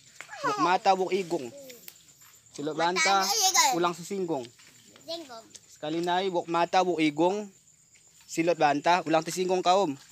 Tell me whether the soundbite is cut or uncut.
uncut